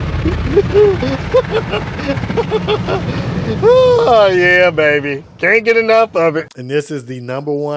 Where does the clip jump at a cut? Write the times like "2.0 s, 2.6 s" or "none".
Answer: 6.5 s